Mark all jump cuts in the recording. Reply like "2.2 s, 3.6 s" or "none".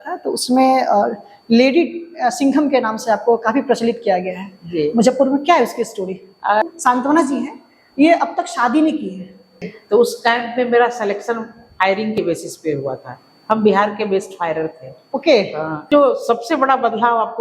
6.6 s, 9.7 s, 15.8 s

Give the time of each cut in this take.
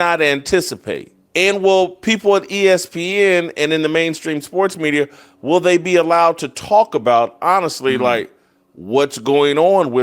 1.2 s

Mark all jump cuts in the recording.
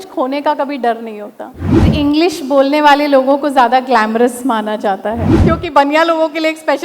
1.9 s, 5.3 s

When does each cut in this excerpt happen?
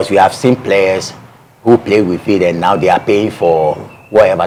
none

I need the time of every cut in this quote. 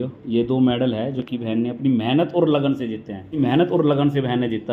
3.4 s

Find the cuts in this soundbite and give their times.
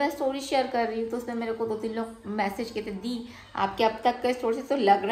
none

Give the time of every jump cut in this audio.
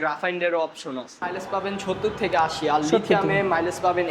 1.2 s

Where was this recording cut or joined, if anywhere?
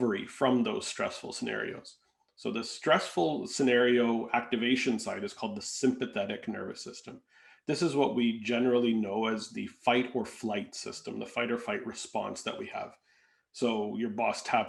none

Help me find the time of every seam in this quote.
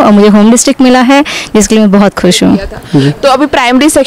2.6 s

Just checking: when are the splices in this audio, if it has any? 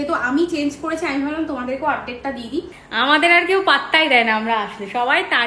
2.8 s

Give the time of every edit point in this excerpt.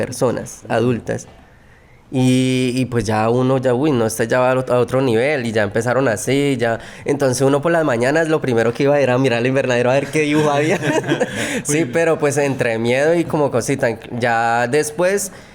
none

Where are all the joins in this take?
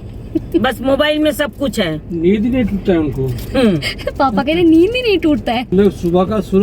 5.7 s

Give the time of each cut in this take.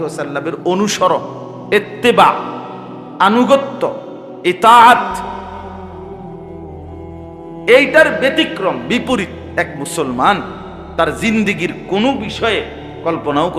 5.4 s, 7.0 s

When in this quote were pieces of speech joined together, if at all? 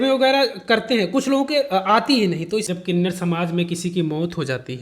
2.7 s

